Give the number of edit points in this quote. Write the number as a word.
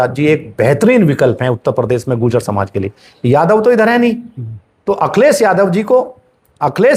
zero